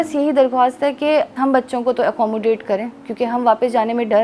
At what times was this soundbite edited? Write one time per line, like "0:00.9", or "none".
0:01.3